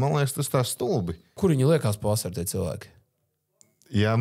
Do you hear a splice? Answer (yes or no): yes